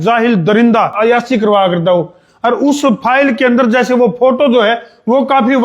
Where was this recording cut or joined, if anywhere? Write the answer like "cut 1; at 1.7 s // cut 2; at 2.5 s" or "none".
cut 1; at 0.9 s